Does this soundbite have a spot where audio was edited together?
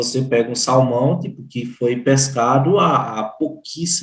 no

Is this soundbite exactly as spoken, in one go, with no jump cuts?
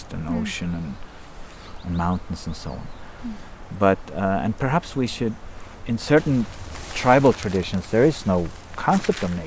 yes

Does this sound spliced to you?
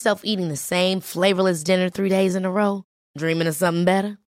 no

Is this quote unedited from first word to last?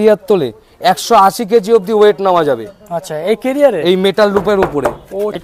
yes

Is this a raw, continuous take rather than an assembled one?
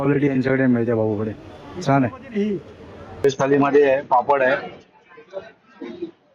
no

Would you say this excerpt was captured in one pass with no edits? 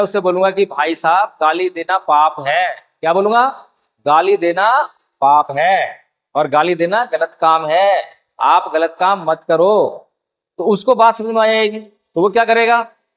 yes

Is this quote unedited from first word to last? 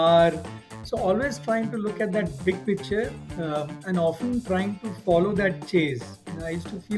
yes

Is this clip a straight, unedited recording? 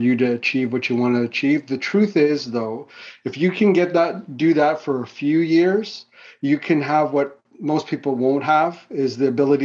yes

